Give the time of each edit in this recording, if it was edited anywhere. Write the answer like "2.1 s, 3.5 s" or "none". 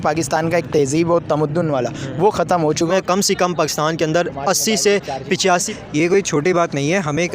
2.9 s, 5.7 s